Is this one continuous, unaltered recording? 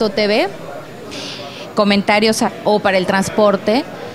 yes; 0 cuts

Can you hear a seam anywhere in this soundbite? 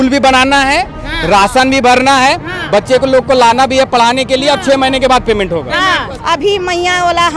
yes; 1 cut; at 6.1 s

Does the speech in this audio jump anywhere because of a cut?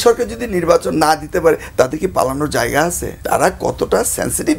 yes; 1 cut; at 3.1 s

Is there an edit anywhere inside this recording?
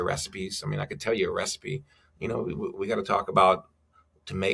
no; 0 cuts

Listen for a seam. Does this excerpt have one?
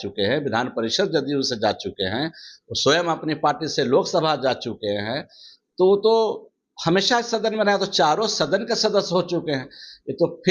no; 0 cuts

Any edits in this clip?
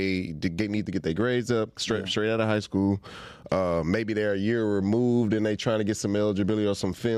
no; 0 cuts

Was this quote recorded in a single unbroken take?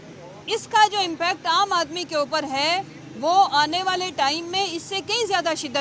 yes; 0 cuts

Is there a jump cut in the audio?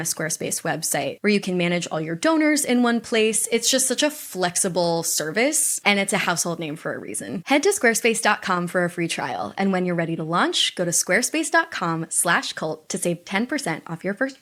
no; 0 cuts

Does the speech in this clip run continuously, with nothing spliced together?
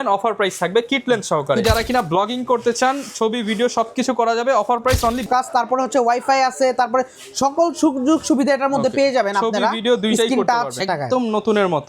no; 3 cuts; at 1.6 s, 5.3 s, 10.8 s

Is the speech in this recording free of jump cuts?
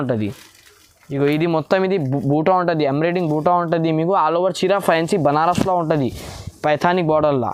yes; 0 cuts

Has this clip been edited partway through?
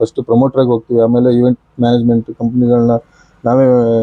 no; 0 cuts

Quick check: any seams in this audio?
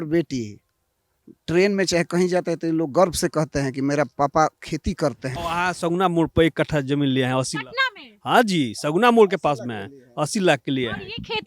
yes; 1 cut; at 5.3 s

